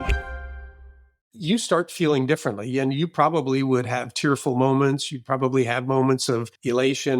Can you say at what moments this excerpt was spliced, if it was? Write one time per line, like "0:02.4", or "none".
0:01.3